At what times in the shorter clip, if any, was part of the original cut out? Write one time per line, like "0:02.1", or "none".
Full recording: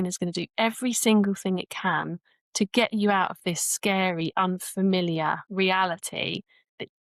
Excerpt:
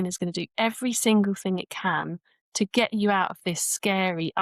none